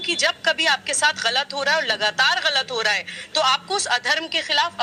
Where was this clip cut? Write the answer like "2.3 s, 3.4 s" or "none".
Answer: none